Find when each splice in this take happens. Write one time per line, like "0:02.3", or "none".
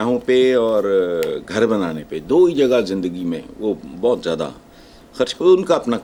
none

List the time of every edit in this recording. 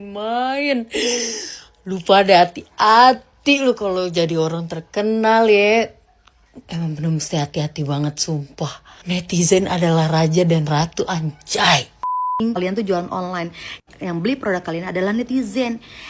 0:08.9
0:12.4

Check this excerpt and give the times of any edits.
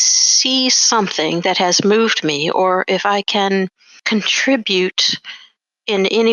0:03.9

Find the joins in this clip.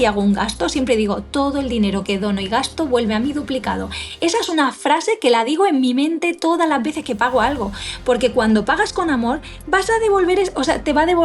none

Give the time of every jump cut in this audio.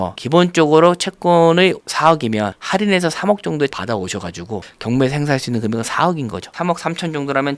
0:04.7
0:06.5

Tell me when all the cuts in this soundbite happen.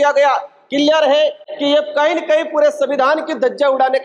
none

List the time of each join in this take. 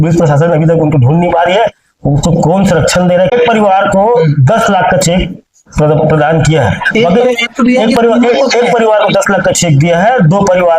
0:03.3

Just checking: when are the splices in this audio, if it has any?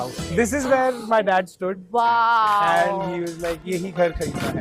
0:03.6

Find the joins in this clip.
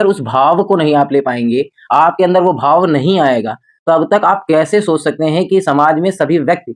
none

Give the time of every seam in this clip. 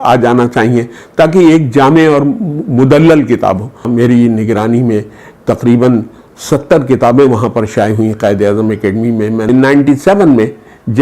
0:03.9
0:09.5

